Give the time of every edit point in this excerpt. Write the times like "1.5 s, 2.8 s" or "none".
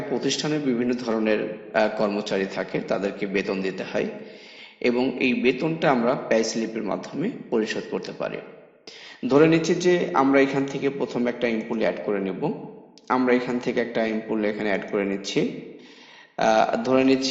2.1 s